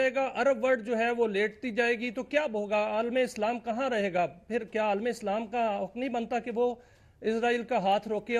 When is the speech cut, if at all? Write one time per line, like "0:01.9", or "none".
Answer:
none